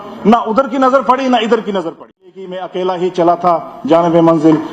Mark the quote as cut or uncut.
cut